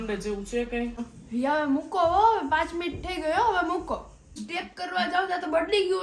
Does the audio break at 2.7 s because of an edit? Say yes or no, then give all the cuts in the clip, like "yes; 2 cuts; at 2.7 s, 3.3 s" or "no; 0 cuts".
no; 2 cuts; at 1.0 s, 4.5 s